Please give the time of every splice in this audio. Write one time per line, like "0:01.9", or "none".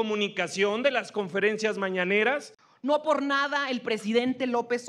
0:02.5